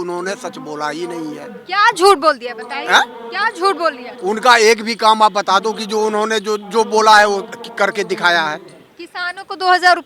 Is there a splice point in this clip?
no; 0 cuts

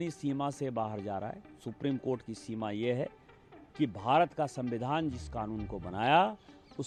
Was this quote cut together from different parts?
no; 0 cuts

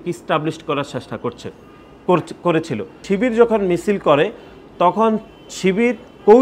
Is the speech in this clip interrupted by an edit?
no; 0 cuts

